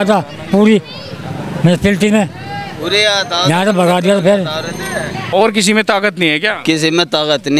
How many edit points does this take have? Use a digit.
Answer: 1